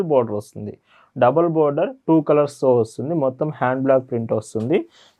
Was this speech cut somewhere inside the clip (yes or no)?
no